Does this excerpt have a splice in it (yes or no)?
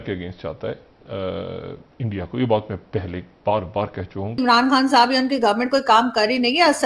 yes